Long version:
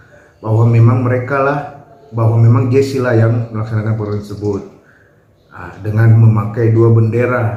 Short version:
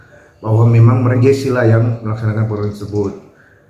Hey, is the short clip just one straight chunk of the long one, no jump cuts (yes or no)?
no